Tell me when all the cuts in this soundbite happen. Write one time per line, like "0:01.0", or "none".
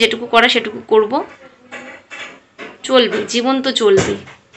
none